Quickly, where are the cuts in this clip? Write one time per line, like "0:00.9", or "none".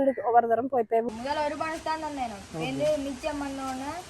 0:01.1